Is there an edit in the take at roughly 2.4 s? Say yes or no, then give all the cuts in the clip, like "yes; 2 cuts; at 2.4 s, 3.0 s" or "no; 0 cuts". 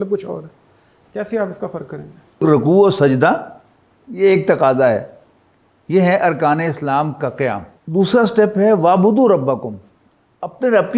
yes; 2 cuts; at 2.4 s, 7.7 s